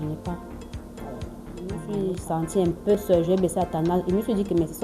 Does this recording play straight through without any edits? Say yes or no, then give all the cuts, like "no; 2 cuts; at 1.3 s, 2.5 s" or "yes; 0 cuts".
no; 1 cut; at 1.9 s